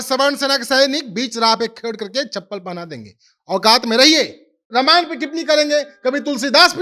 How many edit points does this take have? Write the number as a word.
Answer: one